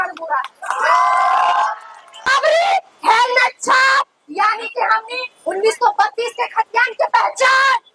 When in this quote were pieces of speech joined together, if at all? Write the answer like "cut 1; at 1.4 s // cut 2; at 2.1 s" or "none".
cut 1; at 2.3 s